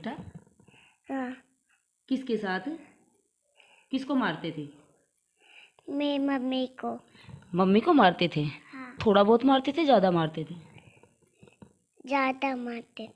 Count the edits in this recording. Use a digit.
0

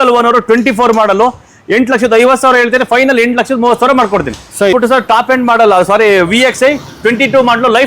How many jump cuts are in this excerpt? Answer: 1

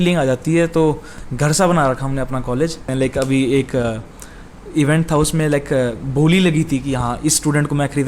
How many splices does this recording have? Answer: 2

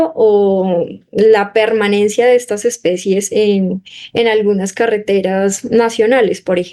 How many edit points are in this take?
0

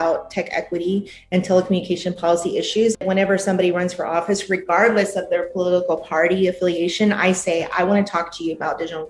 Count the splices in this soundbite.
1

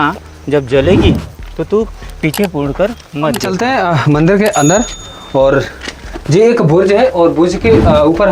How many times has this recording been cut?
1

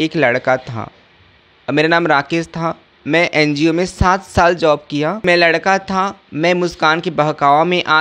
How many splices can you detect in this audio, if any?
1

